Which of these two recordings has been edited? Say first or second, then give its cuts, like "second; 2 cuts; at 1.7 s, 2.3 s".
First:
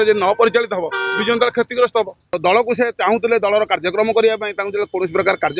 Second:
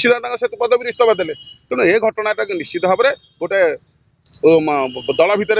first; 1 cut; at 2.2 s